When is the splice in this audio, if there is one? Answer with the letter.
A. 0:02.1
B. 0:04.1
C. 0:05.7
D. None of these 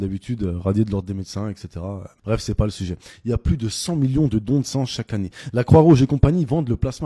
A